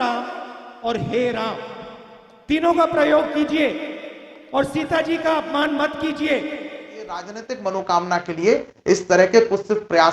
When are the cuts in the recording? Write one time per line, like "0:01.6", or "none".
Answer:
0:07.4